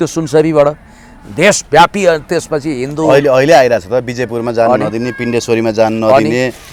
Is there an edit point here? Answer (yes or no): no